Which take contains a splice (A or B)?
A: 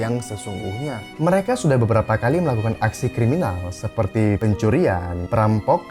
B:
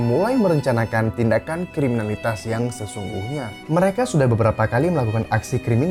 A